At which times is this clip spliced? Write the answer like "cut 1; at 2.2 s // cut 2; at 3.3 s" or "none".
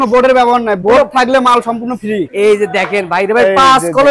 cut 1; at 2.3 s